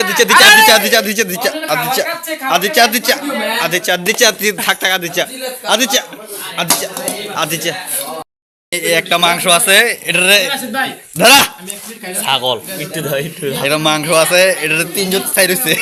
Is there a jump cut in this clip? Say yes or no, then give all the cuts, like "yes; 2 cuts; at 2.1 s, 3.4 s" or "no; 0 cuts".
no; 0 cuts